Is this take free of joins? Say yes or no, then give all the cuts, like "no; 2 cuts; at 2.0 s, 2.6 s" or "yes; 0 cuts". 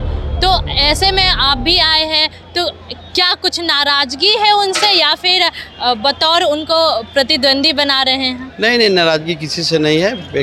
yes; 0 cuts